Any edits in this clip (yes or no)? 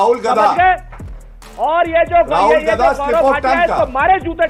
no